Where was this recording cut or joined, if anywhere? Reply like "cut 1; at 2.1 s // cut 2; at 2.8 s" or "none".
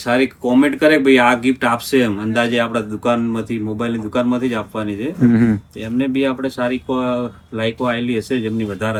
none